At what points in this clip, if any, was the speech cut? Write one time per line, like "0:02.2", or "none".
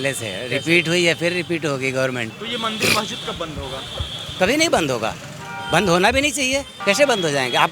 0:02.4
0:06.7